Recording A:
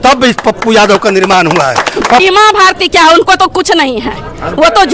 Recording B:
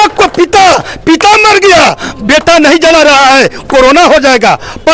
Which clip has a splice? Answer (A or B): A